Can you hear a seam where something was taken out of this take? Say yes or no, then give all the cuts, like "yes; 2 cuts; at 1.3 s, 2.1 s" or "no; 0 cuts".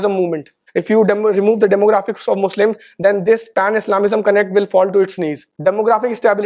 yes; 1 cut; at 5.4 s